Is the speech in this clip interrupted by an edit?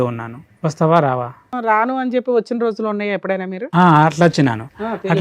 yes; 1 cut; at 1.5 s

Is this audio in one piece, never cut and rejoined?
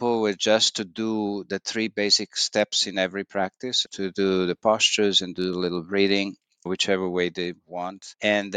yes; 0 cuts

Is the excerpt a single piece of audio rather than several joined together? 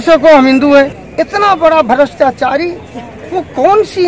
no; 1 cut; at 1.0 s

